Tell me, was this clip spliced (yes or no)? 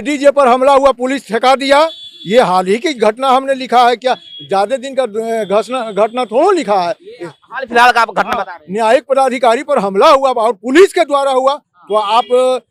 no